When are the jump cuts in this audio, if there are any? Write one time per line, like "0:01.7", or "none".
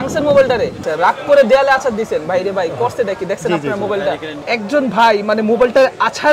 0:00.8
0:04.3